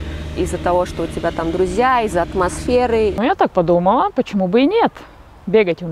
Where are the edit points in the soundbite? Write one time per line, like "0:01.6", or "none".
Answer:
0:03.1

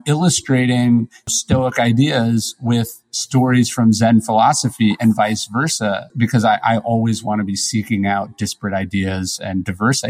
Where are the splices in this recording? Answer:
0:01.3
0:06.1

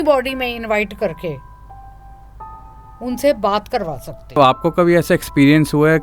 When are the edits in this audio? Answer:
0:04.4

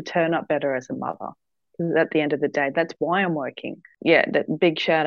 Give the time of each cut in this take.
0:03.9

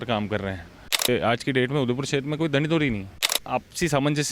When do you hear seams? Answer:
0:01.1
0:03.3

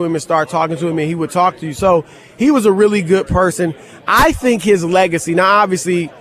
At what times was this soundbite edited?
none

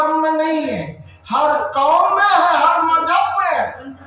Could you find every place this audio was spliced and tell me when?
none

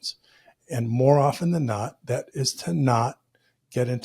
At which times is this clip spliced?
0:02.3

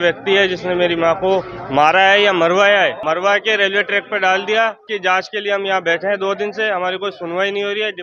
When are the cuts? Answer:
0:03.0
0:04.8

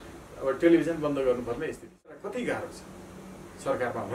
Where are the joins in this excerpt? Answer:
0:02.2

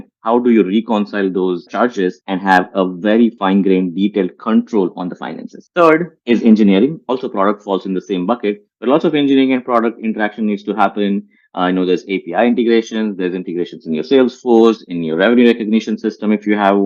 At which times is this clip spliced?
0:01.8
0:03.4
0:06.1
0:07.0

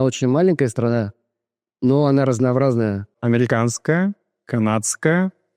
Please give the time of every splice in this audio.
0:03.1

